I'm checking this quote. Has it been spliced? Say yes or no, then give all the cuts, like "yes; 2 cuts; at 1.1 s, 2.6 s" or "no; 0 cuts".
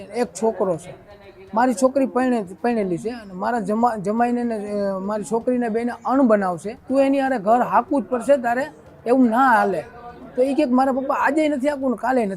yes; 1 cut; at 6.7 s